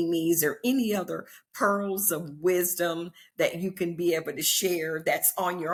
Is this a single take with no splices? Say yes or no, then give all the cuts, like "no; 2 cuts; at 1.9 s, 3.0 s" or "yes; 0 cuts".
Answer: yes; 0 cuts